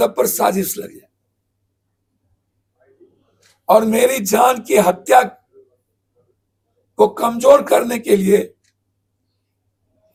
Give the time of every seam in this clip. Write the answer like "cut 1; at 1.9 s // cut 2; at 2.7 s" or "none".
none